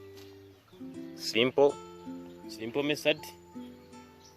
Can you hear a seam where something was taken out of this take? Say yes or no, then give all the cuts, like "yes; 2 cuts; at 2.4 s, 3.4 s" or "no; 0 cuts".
yes; 1 cut; at 3.2 s